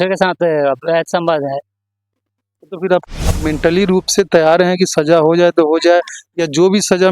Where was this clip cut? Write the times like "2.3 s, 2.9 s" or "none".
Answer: 3.0 s